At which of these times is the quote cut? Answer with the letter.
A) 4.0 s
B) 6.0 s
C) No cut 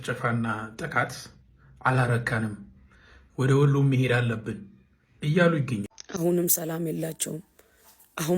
B